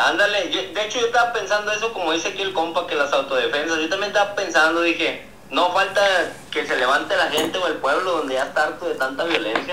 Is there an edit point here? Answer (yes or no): no